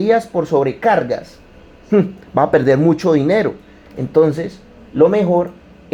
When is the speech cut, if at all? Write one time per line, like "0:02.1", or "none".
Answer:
none